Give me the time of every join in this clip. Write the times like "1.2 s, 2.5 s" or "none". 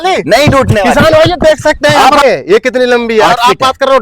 2.2 s